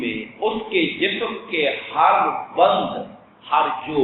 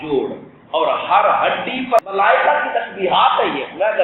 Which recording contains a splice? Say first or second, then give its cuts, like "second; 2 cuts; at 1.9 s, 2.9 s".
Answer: second; 1 cut; at 2.1 s